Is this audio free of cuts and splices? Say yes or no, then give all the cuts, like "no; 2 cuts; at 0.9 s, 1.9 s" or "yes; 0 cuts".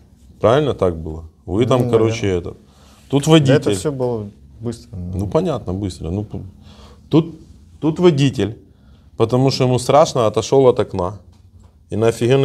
yes; 0 cuts